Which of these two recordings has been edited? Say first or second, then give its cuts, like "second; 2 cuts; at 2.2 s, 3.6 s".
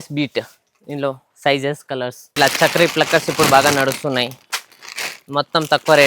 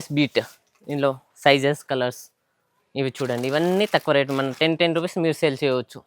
first; 1 cut; at 2.3 s